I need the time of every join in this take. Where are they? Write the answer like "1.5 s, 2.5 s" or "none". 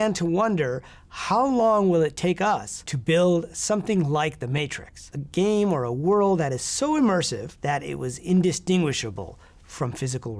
5.1 s, 7.4 s